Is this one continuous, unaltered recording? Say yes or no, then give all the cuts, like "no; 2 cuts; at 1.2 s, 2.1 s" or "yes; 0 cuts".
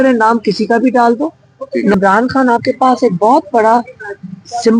no; 1 cut; at 1.9 s